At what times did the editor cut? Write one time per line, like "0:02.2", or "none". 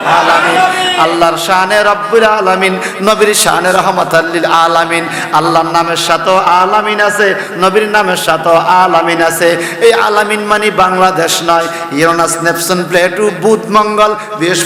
none

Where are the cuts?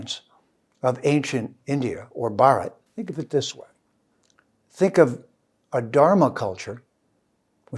0:02.8

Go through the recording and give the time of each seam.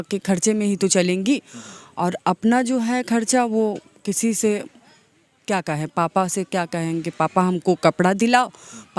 none

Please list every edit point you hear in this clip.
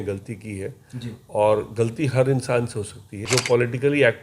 0:03.2

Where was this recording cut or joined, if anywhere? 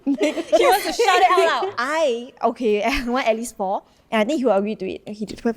0:01.7

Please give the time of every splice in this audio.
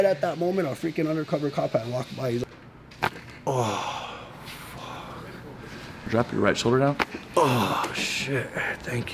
0:02.5
0:06.1

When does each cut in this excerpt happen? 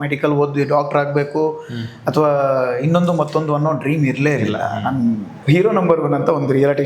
0:05.3

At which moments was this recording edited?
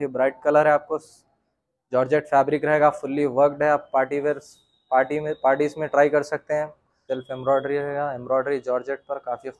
0:06.9

